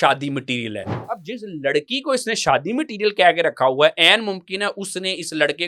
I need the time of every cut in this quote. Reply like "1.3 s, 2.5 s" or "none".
0.9 s